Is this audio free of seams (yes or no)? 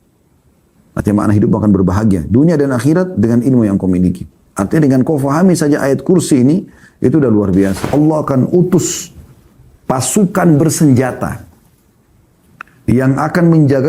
no